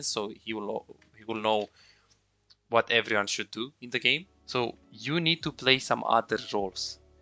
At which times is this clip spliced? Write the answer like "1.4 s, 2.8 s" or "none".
4.3 s